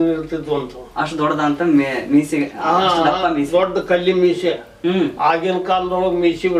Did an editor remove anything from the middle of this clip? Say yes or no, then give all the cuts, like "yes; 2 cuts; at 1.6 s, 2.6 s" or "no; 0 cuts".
no; 0 cuts